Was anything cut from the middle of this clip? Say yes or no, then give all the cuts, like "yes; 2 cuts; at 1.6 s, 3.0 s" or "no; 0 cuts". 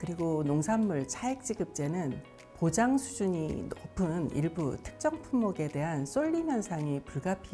no; 0 cuts